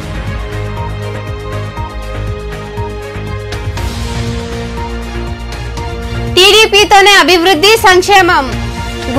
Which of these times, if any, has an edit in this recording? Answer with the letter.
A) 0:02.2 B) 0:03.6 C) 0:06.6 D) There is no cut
B